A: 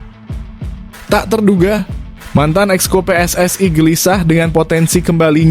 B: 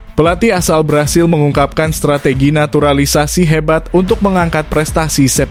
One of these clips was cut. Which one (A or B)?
A